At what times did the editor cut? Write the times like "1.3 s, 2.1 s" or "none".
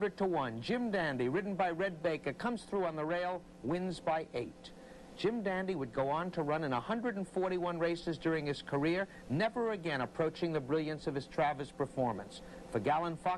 12.4 s